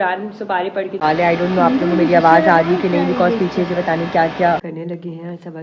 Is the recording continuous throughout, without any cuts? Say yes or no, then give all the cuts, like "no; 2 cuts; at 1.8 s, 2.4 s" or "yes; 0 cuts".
no; 2 cuts; at 1.0 s, 4.7 s